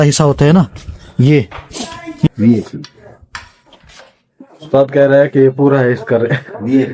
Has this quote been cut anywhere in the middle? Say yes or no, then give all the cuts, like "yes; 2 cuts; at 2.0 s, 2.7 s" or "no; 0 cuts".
yes; 1 cut; at 2.3 s